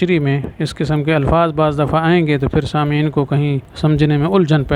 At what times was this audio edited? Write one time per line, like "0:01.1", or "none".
0:03.7